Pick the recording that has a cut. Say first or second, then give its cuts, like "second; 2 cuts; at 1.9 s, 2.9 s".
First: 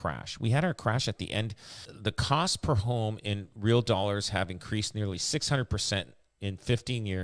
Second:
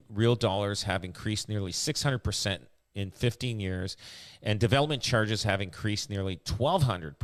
first; 1 cut; at 1.9 s